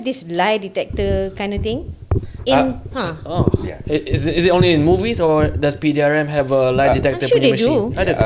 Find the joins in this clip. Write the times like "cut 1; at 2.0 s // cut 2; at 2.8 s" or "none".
none